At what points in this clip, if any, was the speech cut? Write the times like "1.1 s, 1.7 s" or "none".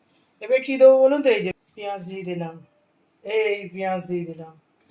1.6 s